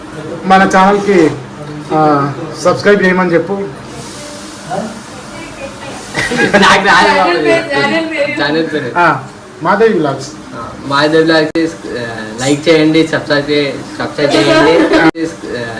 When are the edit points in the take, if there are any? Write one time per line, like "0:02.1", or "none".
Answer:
none

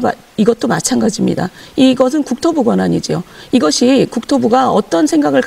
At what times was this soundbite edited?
none

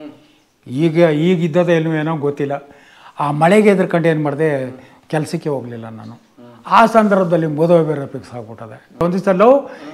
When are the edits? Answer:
0:09.0

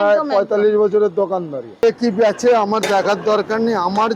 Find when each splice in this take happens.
0:01.7

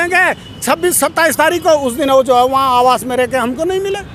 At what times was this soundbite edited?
none

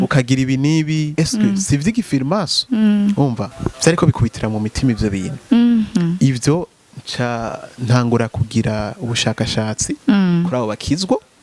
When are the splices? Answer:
0:01.1
0:02.6
0:04.1

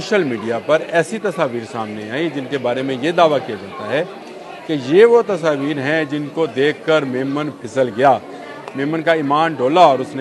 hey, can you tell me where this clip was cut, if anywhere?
none

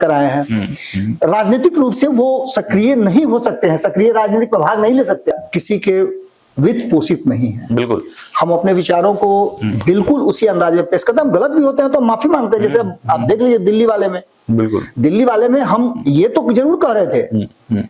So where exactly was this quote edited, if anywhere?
0:05.3

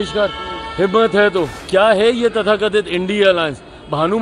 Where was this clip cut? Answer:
0:01.6

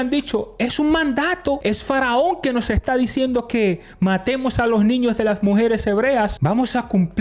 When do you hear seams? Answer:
0:01.6
0:06.4

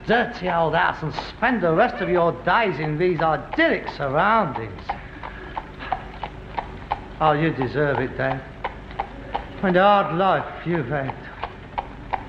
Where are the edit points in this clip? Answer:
0:08.1

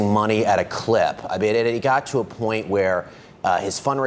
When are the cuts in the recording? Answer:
none

